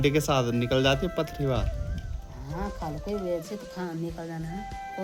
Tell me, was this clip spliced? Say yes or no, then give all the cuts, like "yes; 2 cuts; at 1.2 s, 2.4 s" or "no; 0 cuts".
no; 0 cuts